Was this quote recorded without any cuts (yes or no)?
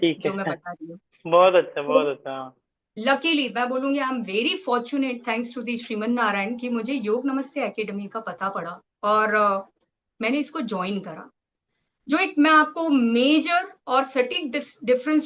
no